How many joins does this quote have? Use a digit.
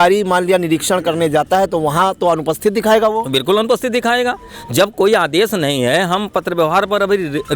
0